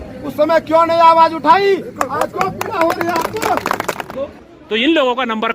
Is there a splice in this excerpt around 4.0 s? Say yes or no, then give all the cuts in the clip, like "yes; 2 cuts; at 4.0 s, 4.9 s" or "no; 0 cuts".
yes; 1 cut; at 4.0 s